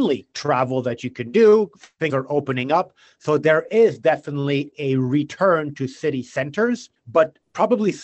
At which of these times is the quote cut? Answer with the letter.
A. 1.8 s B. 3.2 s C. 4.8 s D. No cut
D